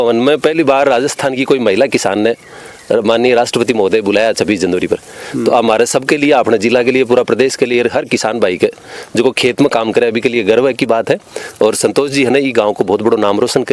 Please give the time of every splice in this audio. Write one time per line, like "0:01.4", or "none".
none